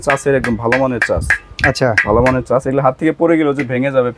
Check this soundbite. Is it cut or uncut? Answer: uncut